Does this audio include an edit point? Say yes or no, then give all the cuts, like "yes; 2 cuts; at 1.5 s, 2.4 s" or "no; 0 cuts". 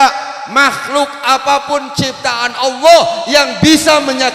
no; 0 cuts